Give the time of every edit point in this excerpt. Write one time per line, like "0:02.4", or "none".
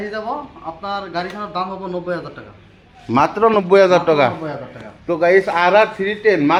none